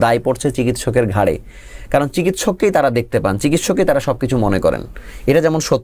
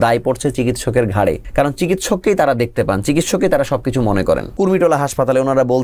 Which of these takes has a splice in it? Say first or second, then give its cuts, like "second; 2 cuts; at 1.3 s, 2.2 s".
second; 2 cuts; at 1.4 s, 4.5 s